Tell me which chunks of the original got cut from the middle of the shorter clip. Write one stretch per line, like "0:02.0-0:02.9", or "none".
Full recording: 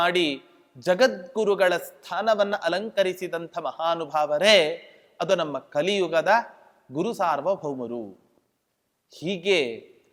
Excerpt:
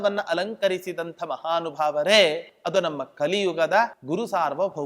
0:04.9-0:05.1
0:06.5-0:06.8